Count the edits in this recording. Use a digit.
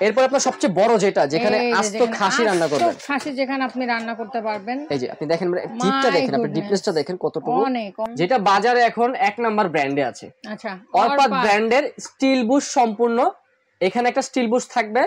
1